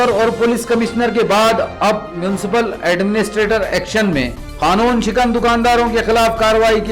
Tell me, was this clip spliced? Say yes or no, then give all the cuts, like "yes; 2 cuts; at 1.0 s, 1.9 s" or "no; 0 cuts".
no; 0 cuts